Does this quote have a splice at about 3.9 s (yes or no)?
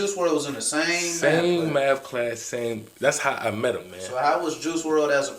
yes